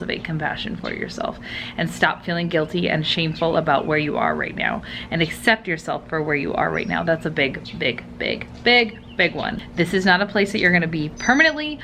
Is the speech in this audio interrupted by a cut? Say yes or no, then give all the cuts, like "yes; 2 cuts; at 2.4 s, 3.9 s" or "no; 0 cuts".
yes; 1 cut; at 9.6 s